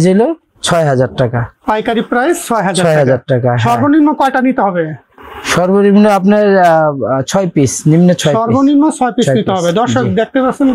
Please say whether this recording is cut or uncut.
uncut